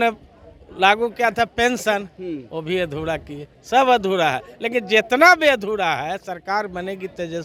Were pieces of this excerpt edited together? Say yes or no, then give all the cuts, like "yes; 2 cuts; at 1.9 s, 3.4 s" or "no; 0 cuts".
no; 0 cuts